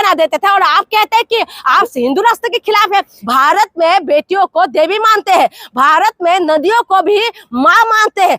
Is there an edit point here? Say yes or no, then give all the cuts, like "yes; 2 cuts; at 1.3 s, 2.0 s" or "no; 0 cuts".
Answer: yes; 1 cut; at 3.2 s